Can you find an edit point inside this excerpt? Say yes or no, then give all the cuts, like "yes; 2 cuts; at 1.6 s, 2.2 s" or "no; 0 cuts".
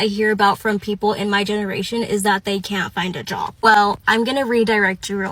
no; 0 cuts